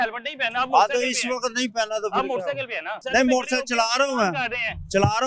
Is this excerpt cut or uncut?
cut